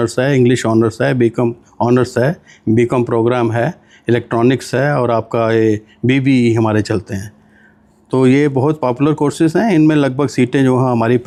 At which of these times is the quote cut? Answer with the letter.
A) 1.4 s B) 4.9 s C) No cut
C